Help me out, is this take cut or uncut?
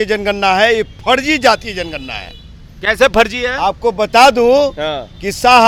uncut